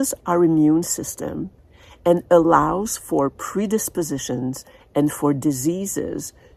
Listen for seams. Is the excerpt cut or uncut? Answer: uncut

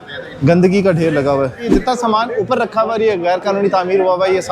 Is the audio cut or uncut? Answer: cut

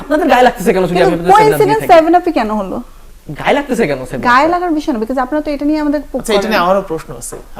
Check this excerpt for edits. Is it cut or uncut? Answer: uncut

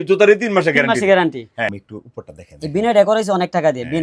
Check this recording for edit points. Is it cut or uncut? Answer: cut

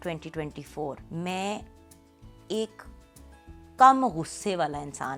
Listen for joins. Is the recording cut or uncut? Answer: cut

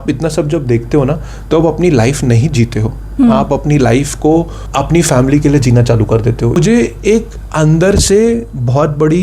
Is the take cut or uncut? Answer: cut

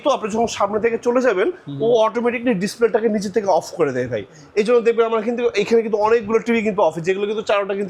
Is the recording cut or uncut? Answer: uncut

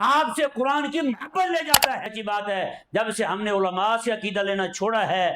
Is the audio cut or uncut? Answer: cut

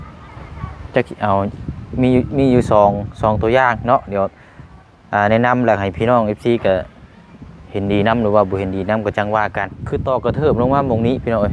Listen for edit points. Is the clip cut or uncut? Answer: cut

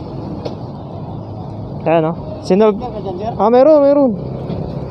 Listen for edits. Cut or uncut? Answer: uncut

